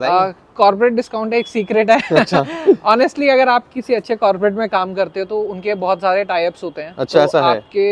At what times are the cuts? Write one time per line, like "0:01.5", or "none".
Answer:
none